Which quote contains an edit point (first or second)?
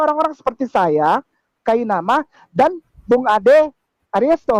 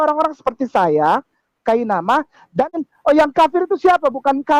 second